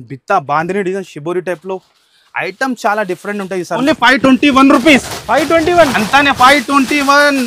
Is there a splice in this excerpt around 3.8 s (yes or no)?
yes